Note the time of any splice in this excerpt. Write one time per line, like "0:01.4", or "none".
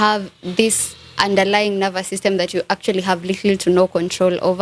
none